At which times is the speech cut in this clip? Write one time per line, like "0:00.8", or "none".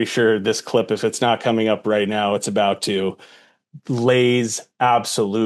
none